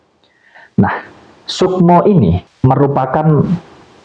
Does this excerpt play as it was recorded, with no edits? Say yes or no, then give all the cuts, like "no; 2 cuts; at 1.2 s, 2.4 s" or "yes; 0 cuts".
no; 1 cut; at 2.5 s